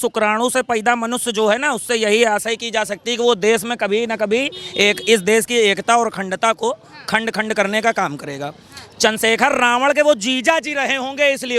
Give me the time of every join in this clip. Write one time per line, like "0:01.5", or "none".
none